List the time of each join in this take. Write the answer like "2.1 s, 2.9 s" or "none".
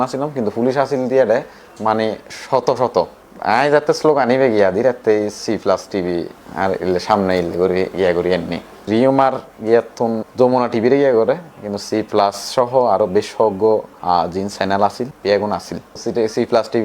8.9 s, 10.2 s, 15.1 s